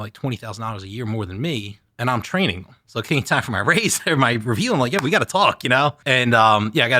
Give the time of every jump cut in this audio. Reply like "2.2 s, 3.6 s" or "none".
2.7 s, 6.0 s